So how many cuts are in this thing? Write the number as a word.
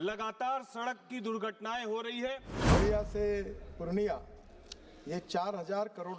one